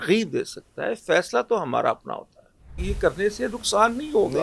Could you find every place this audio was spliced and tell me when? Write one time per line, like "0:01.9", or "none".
0:02.8